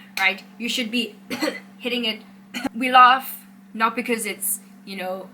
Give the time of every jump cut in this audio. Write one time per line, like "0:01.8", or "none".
0:02.7